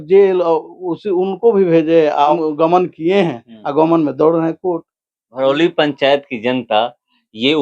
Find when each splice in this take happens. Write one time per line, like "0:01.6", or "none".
0:02.4